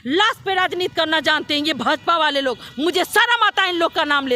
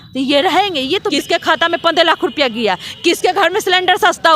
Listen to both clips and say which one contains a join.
second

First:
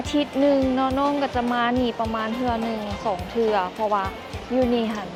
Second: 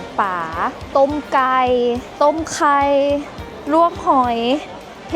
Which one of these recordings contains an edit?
second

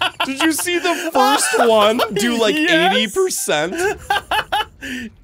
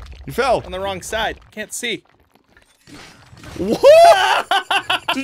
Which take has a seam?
second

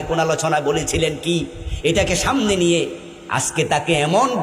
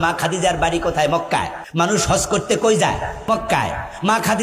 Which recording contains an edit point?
second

